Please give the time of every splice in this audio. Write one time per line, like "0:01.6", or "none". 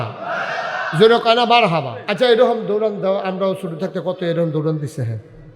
0:02.0